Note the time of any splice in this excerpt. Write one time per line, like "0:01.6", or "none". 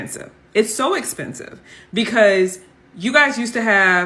none